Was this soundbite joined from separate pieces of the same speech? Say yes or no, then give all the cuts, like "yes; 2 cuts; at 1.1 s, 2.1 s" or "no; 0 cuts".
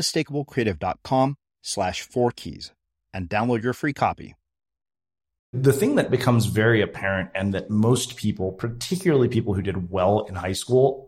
yes; 1 cut; at 5.5 s